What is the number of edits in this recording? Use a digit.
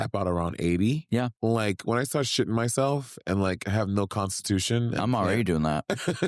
1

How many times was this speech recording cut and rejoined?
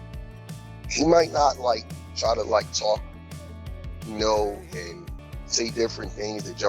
1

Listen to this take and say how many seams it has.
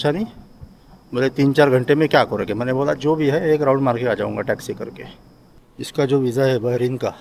1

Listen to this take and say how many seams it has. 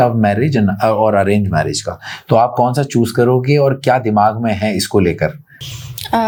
0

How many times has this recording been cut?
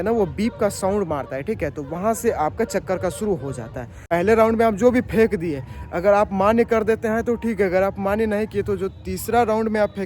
1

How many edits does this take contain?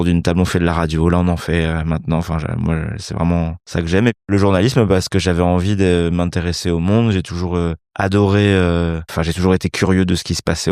3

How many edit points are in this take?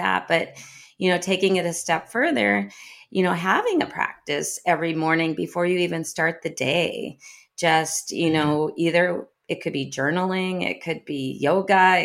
0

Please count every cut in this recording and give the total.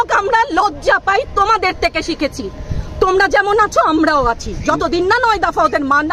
0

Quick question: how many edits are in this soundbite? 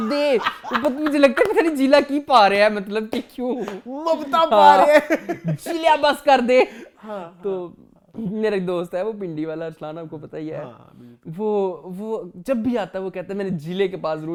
0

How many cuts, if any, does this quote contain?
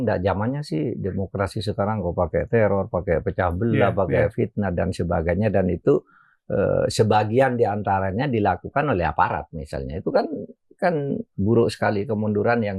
0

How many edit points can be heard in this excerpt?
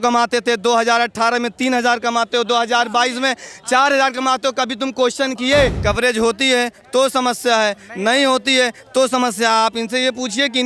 1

